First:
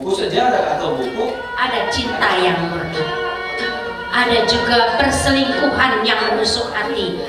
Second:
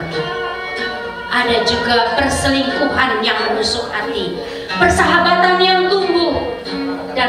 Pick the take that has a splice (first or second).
first